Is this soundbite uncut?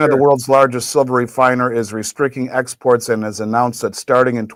yes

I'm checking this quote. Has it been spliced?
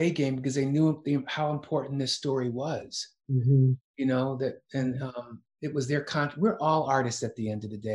no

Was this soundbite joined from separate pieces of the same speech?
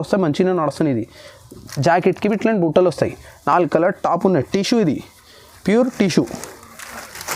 no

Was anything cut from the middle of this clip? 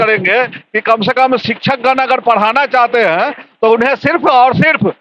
no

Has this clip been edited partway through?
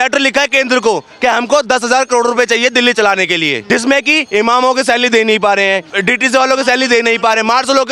yes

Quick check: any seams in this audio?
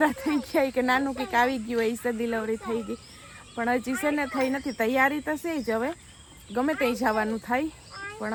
no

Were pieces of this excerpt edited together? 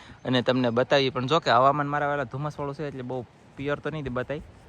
no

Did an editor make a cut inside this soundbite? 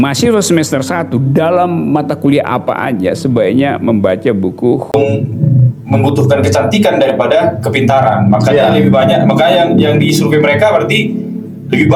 yes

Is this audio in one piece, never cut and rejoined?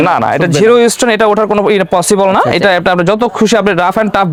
yes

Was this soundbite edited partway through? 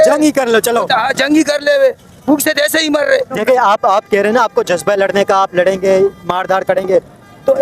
yes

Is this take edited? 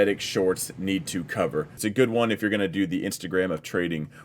yes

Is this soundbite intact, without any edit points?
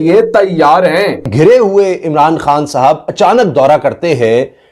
no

